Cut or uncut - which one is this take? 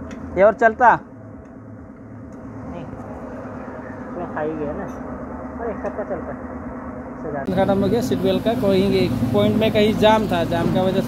cut